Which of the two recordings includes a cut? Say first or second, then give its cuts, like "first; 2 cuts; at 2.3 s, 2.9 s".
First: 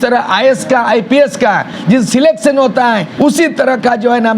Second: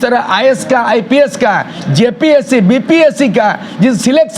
first; 2 cuts; at 1.7 s, 3.1 s